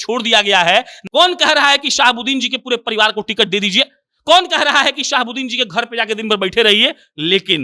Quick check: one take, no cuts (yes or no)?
no